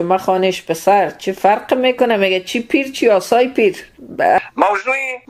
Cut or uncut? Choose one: cut